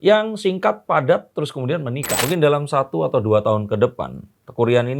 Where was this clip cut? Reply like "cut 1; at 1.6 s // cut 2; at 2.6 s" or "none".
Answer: cut 1; at 2.1 s